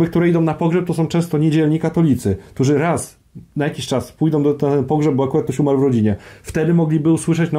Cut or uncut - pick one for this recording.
uncut